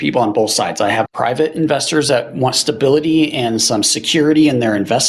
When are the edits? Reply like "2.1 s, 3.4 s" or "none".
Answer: 1.1 s

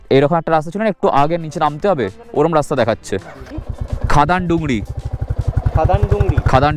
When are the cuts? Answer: none

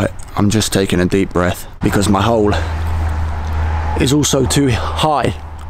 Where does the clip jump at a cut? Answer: 1.7 s

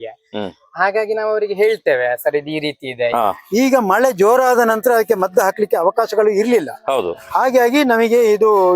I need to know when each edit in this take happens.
3.1 s

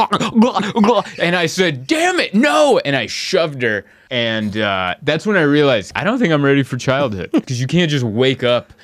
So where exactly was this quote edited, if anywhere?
3.9 s, 5.9 s, 7.5 s

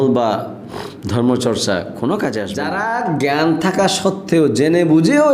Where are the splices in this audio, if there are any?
2.6 s

